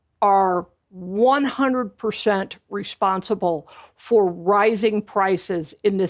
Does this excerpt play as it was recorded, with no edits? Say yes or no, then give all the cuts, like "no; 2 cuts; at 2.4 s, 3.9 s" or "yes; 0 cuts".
yes; 0 cuts